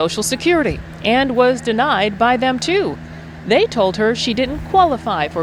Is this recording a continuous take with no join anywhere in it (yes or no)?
yes